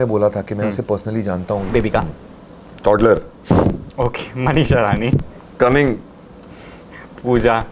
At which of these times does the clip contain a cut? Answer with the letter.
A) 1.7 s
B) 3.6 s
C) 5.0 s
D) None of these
A